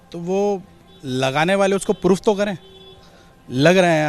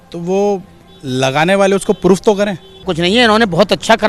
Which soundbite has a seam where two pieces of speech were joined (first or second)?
second